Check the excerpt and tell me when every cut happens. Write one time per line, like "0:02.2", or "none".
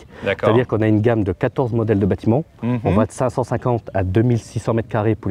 none